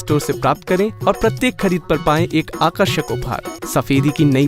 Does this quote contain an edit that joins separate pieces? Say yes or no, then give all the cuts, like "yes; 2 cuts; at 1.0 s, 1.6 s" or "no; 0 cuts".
yes; 1 cut; at 3.5 s